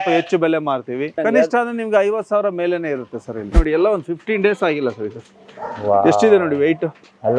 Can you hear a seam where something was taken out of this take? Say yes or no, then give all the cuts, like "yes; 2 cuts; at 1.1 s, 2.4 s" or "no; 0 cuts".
yes; 2 cuts; at 1.1 s, 3.6 s